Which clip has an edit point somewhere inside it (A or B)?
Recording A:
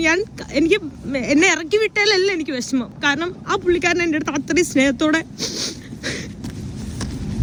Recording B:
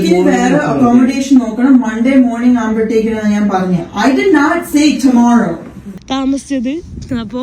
B